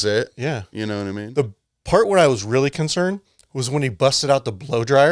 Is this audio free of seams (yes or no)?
no